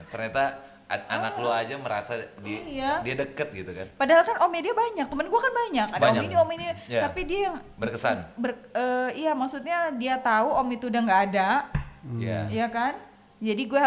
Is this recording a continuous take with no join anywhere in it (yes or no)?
yes